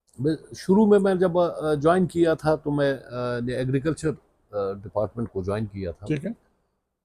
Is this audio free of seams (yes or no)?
yes